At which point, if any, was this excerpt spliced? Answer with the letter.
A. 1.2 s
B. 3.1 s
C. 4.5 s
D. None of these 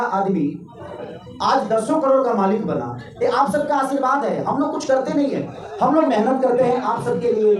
D